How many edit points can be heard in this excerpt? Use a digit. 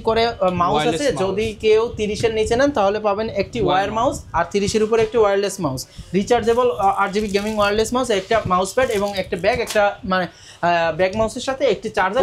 0